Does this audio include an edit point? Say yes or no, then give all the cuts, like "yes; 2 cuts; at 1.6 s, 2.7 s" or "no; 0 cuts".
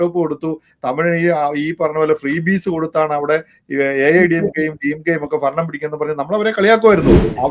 no; 0 cuts